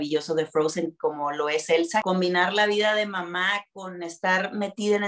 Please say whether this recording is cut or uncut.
cut